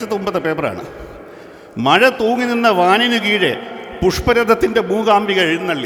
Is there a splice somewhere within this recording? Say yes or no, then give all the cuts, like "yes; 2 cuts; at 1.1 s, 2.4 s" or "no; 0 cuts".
no; 0 cuts